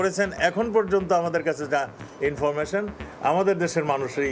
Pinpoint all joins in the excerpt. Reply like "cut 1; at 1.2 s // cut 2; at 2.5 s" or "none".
none